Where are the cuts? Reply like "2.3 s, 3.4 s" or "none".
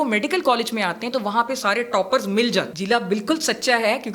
2.7 s